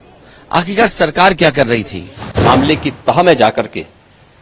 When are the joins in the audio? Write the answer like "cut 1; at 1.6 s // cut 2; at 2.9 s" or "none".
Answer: cut 1; at 2.2 s